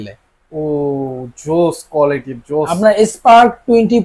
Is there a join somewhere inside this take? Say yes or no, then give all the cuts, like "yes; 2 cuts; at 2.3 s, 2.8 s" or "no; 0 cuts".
no; 0 cuts